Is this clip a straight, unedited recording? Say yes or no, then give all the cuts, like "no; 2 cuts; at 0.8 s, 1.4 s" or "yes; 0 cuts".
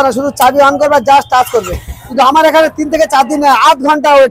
no; 1 cut; at 2.0 s